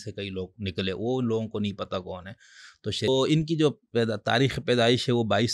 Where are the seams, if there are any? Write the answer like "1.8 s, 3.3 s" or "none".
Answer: 3.1 s